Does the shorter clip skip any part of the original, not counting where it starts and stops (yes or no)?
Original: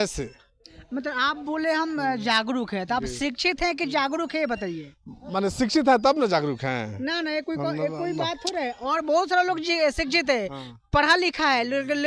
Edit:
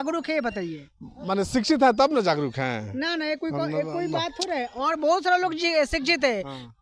no